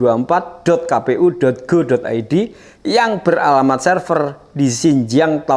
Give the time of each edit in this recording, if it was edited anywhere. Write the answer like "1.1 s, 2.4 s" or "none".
none